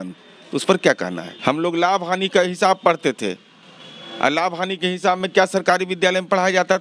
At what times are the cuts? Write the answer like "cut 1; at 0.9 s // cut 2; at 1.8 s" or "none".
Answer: cut 1; at 1.3 s